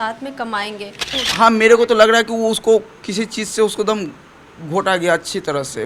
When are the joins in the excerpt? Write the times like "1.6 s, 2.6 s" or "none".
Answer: 1.2 s